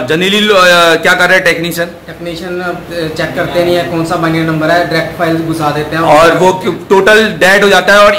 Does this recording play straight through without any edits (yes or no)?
yes